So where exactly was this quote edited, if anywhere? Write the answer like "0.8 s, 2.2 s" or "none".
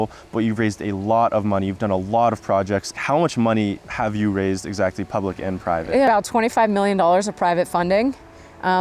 2.9 s, 6.1 s